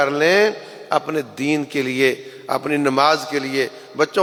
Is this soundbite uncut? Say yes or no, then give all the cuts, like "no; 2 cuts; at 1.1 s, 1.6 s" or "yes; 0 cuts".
yes; 0 cuts